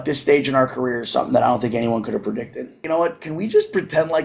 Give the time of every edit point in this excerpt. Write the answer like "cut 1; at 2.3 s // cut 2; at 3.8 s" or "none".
cut 1; at 2.8 s